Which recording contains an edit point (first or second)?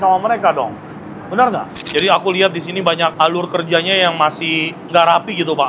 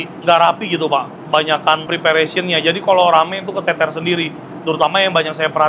first